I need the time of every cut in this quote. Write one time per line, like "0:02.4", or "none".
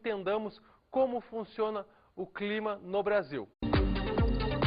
none